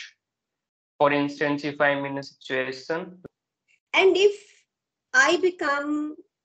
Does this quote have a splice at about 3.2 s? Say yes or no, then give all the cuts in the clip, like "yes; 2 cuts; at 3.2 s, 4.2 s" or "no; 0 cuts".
yes; 1 cut; at 3.2 s